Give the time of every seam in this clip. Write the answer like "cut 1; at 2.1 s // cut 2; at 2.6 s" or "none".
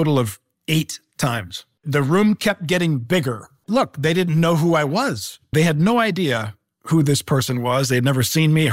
cut 1; at 1.7 s // cut 2; at 3.6 s